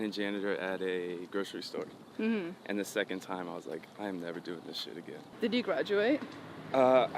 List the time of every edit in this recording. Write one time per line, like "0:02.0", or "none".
0:05.4